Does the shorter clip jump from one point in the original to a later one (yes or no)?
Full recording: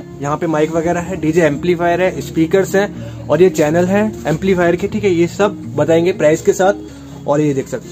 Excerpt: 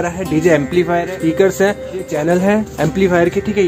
yes